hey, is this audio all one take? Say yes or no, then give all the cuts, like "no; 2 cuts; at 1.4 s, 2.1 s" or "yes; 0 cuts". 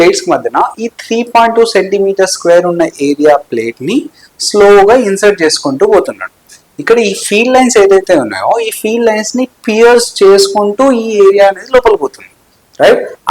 yes; 0 cuts